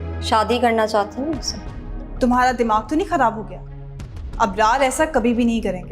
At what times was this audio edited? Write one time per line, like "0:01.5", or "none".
0:02.2

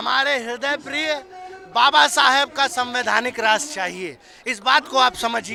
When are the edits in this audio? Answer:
none

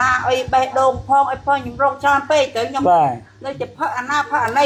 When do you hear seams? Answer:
none

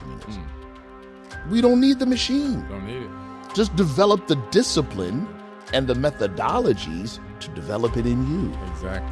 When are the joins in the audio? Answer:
none

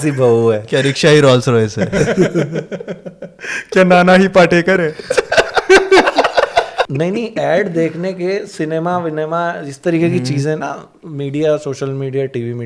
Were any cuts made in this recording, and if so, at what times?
0:06.8

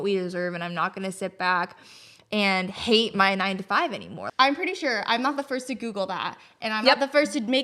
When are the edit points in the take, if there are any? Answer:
0:04.2

